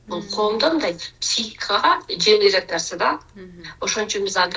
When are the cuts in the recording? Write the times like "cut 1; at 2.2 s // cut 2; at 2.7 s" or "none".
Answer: none